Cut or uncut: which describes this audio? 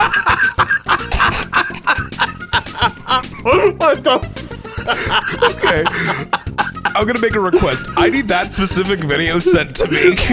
uncut